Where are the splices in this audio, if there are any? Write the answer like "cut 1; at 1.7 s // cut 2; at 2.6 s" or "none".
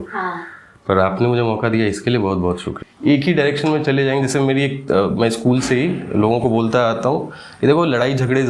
cut 1; at 2.7 s